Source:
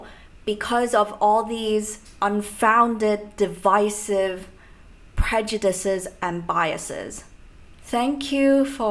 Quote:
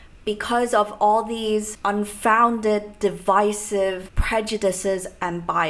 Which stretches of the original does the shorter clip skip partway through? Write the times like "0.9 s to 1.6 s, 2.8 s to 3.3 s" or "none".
2.0 s to 2.1 s, 4.5 s to 5.1 s